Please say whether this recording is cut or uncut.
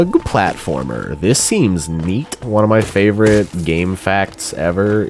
cut